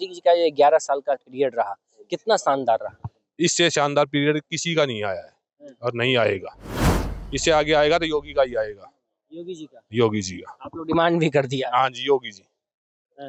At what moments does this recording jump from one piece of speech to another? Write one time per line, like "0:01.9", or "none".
none